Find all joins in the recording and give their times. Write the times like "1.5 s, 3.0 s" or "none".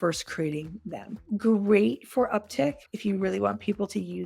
2.8 s